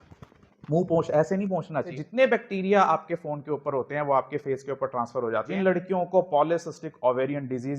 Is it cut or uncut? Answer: cut